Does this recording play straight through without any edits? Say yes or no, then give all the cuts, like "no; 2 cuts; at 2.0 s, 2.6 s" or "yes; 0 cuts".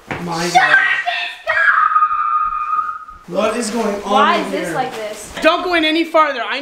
no; 1 cut; at 5.3 s